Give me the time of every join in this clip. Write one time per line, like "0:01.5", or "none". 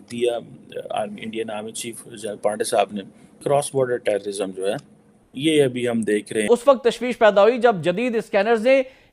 0:03.4
0:06.5